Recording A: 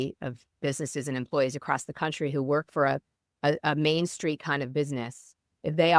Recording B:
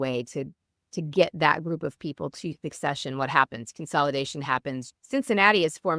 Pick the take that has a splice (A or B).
B